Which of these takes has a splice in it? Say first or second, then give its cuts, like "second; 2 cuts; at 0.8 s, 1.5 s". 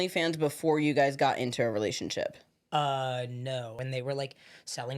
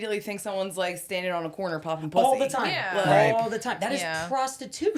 first; 1 cut; at 3.7 s